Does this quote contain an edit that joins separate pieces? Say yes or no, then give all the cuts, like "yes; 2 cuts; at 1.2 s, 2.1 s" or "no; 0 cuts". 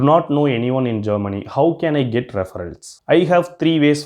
no; 0 cuts